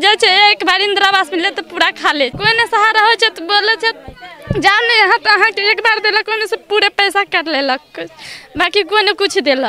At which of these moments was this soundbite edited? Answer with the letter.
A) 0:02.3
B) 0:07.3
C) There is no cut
A